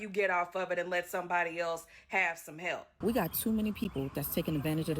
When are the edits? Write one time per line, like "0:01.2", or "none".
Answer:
0:02.9